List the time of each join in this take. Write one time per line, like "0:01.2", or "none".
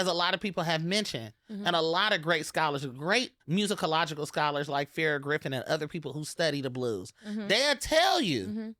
none